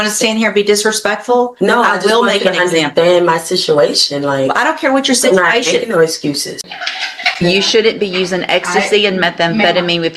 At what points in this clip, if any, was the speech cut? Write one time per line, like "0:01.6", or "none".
0:06.6